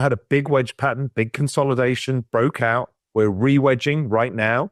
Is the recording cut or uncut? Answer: uncut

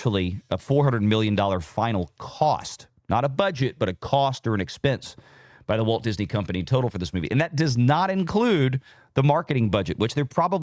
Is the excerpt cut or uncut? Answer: uncut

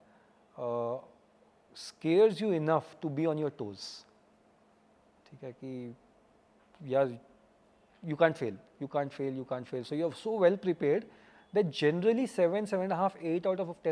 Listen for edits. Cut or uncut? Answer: uncut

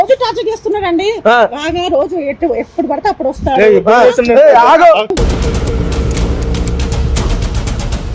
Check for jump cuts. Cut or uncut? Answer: uncut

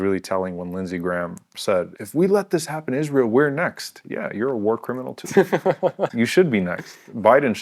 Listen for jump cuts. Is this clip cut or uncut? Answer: cut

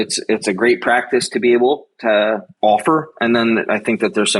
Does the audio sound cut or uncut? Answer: cut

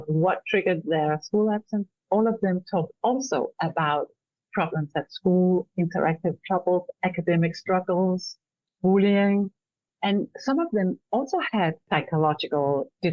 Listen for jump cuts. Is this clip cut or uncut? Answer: cut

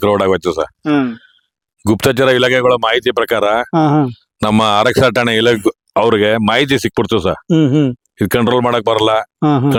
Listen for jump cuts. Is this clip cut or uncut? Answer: uncut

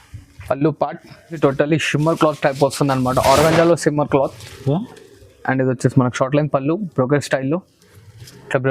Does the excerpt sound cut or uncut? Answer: cut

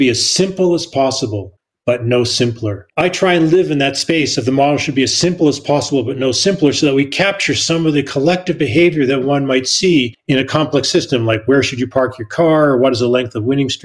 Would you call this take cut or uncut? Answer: cut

